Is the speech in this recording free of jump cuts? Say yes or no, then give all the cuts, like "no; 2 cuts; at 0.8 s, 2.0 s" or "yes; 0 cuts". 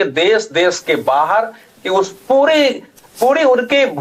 yes; 0 cuts